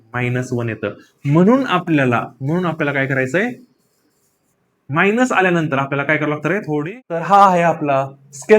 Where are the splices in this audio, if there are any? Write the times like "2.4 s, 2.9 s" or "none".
7.3 s